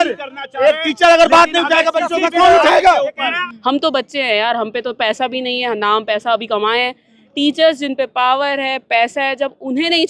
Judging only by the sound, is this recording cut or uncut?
cut